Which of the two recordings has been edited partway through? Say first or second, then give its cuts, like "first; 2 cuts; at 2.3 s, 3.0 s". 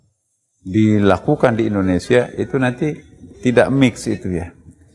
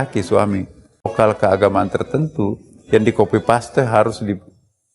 second; 1 cut; at 1.1 s